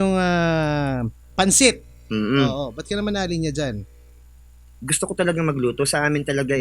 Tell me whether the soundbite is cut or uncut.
uncut